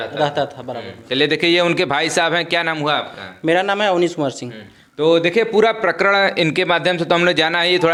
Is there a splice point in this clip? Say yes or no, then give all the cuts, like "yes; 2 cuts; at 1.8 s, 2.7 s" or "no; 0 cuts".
no; 0 cuts